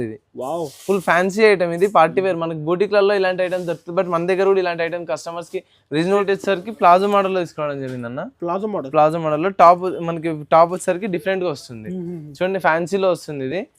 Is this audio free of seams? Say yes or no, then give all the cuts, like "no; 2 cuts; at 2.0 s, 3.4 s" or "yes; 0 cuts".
no; 1 cut; at 6.0 s